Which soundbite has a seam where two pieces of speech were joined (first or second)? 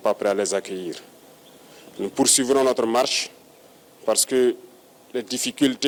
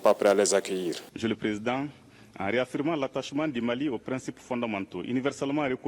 second